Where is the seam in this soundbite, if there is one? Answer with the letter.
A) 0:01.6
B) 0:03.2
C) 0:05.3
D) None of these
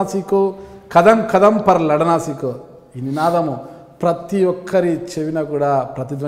D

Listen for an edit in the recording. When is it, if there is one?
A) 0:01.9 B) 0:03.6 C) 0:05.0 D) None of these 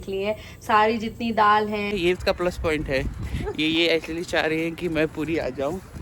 A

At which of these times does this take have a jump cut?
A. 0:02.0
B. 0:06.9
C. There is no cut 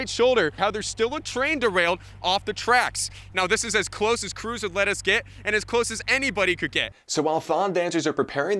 B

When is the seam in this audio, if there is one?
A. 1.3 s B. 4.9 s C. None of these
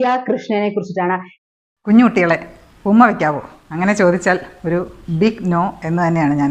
A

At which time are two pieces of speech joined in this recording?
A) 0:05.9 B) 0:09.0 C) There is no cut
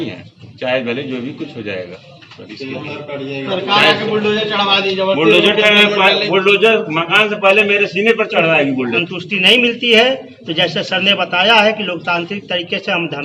B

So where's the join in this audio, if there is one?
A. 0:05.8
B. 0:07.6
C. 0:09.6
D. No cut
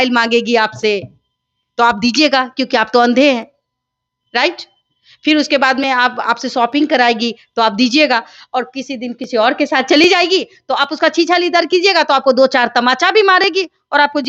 D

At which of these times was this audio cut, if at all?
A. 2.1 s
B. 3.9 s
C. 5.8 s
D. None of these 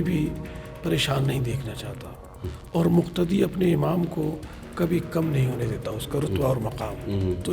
D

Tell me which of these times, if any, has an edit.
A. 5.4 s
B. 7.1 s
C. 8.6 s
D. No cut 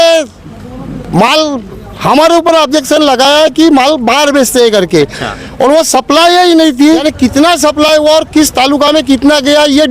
B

